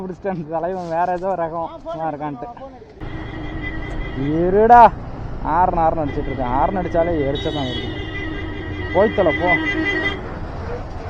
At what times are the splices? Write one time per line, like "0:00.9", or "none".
0:03.0